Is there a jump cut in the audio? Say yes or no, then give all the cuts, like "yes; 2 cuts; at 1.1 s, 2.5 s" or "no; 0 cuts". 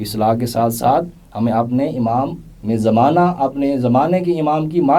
no; 0 cuts